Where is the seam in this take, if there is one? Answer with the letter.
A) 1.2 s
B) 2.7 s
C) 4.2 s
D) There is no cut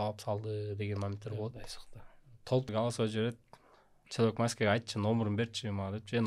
B